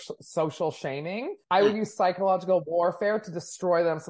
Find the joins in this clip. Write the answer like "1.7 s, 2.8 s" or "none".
1.3 s